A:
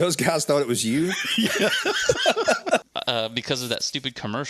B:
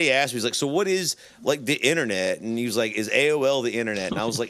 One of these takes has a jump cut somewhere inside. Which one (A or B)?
A